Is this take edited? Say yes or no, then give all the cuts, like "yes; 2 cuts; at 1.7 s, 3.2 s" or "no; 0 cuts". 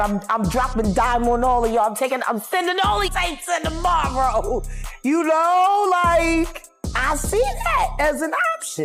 yes; 1 cut; at 3.1 s